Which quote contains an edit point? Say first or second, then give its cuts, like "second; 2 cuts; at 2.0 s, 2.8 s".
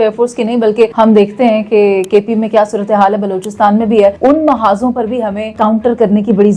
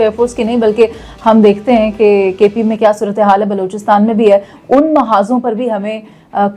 first; 3 cuts; at 0.9 s, 4.2 s, 5.5 s